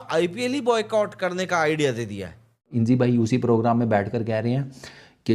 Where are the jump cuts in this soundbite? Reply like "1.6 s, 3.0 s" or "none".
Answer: 2.7 s